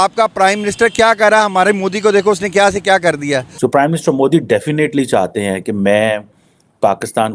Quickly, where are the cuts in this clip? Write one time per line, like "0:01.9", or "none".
0:03.5